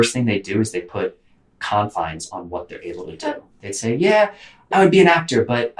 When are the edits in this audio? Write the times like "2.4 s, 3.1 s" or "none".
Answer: 4.7 s

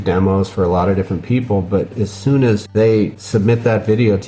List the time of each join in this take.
2.9 s

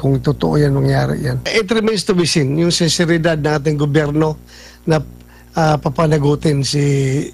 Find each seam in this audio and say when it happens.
1.5 s

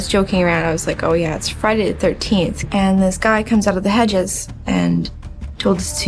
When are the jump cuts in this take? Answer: 2.6 s

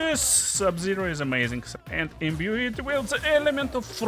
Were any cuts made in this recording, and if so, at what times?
1.8 s

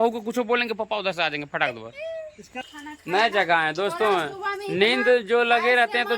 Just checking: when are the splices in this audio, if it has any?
2.7 s

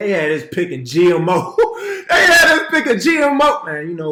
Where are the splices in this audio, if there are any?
none

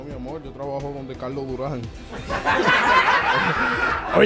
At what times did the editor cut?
none

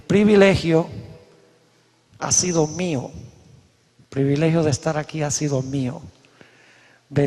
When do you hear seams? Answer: 1.0 s

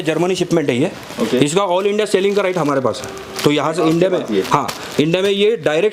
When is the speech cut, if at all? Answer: none

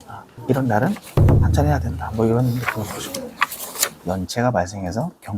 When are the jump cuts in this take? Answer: 4.0 s

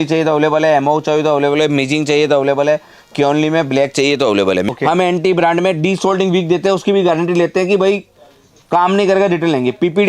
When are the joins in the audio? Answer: 4.7 s

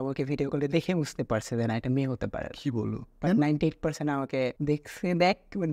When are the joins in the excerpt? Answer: 4.6 s

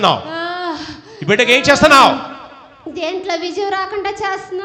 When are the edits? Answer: none

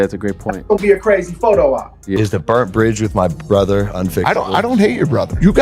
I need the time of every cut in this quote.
2.1 s

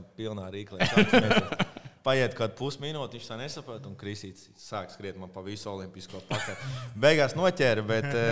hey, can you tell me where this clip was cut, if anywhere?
none

